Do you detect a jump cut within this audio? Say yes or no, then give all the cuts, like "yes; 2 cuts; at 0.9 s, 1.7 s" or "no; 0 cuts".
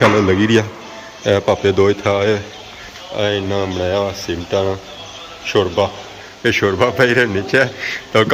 no; 0 cuts